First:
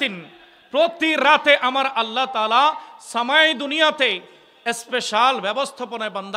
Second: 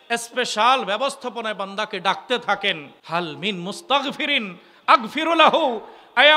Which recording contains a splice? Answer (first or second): second